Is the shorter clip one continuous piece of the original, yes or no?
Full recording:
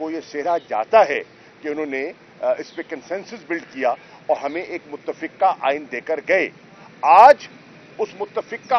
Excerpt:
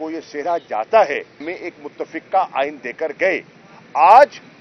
no